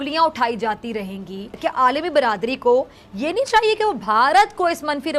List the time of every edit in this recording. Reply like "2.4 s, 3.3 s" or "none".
1.5 s